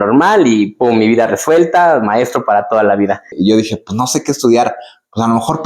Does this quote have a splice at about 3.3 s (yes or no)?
yes